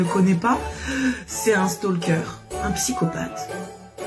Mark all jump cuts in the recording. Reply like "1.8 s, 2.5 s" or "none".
2.4 s